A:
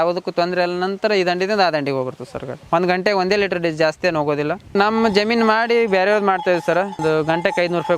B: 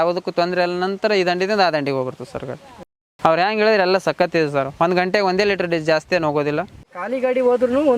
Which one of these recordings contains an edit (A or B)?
A